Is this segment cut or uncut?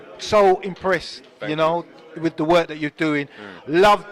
uncut